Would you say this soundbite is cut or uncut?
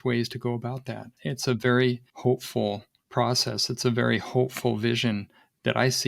cut